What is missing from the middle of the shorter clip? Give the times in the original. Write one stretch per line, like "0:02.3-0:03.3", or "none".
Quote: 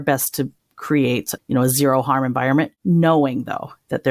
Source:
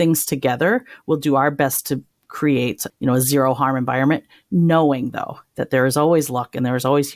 0:04.3-0:04.4